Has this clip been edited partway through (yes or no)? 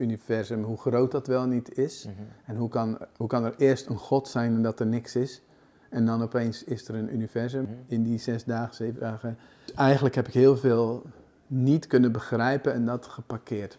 yes